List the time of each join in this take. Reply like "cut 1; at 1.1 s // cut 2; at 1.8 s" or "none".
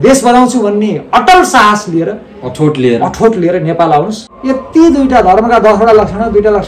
cut 1; at 4.2 s